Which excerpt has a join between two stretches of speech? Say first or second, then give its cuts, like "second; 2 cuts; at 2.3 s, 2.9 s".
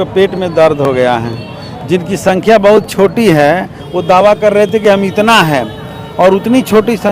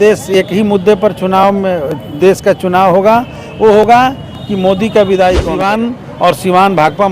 second; 1 cut; at 5.6 s